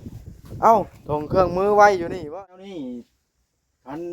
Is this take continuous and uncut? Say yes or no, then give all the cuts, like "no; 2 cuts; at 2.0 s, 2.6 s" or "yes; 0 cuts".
no; 1 cut; at 2.2 s